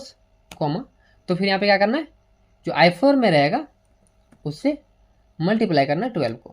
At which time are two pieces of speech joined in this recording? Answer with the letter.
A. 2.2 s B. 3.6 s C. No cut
C